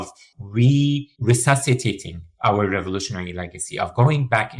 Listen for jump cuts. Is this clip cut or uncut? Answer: cut